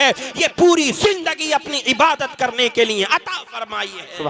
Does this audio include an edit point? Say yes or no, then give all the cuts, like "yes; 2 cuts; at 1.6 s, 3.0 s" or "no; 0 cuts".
no; 0 cuts